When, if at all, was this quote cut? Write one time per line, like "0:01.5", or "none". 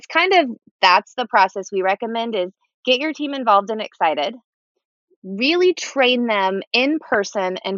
none